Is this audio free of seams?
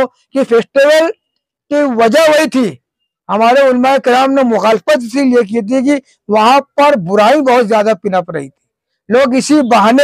yes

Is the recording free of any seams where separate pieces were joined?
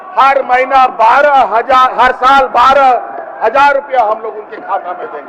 yes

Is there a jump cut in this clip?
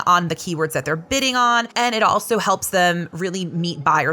yes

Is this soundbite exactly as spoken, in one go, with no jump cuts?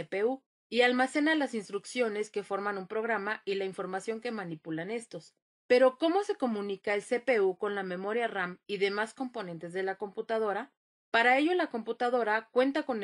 no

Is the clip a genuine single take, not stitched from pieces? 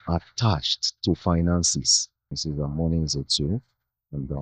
no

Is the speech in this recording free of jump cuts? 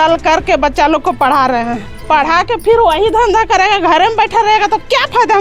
yes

